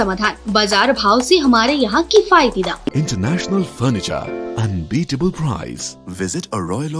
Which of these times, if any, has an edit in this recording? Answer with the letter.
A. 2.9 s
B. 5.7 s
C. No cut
A